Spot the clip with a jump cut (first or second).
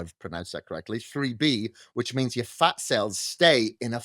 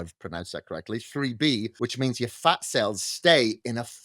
second